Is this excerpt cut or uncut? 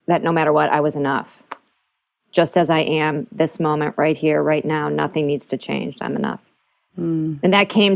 uncut